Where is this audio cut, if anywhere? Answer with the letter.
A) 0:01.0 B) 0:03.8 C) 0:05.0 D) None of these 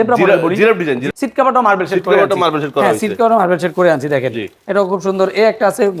A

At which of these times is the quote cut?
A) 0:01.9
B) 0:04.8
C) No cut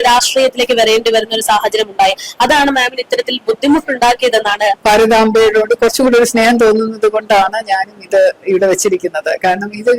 B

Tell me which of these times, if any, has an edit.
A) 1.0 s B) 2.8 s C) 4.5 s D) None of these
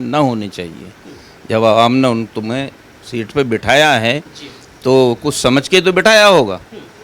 D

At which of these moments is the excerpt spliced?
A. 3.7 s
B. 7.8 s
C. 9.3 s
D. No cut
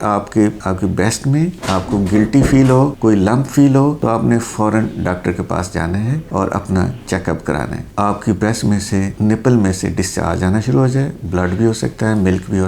B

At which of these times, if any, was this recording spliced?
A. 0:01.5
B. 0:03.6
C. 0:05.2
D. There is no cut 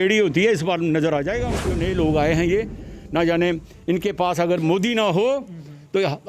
A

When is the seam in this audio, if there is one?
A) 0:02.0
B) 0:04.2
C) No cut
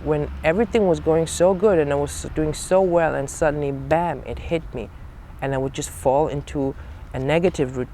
C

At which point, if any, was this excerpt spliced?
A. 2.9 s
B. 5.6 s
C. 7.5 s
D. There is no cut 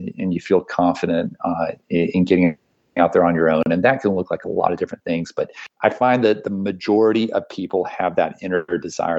B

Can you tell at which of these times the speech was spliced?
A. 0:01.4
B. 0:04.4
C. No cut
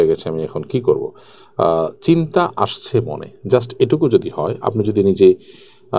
C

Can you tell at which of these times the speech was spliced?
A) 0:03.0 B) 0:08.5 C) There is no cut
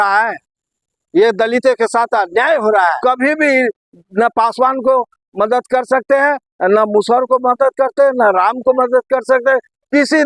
A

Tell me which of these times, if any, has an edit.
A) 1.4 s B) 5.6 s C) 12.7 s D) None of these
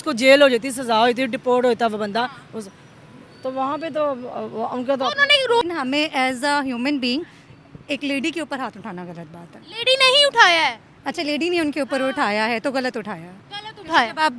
B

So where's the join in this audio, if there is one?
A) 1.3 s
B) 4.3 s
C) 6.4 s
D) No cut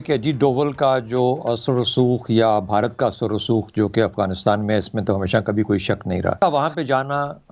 C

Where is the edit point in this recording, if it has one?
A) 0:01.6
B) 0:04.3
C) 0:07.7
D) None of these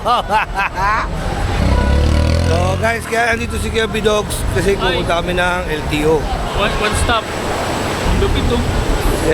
A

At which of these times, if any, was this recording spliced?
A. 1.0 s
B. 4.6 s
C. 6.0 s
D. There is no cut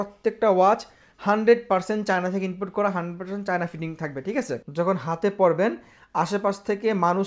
B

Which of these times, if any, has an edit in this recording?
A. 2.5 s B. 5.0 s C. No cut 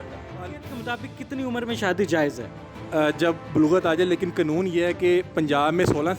C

